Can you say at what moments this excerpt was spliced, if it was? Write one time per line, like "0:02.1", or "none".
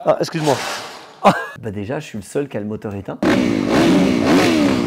0:01.5